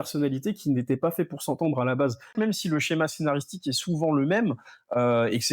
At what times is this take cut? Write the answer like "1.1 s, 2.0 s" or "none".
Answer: 2.3 s